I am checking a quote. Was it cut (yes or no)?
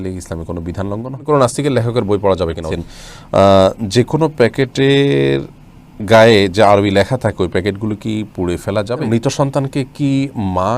yes